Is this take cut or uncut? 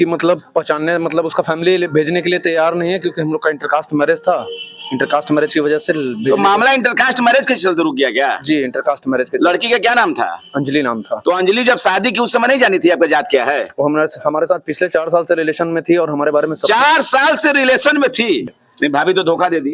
cut